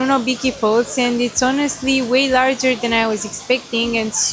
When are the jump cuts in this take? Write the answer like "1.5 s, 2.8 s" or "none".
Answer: none